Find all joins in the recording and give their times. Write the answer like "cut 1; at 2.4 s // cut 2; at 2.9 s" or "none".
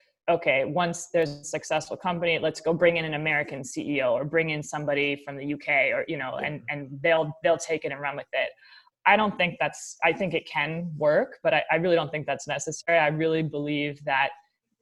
none